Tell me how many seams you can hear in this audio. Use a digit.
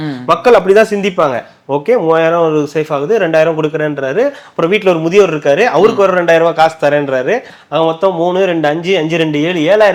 0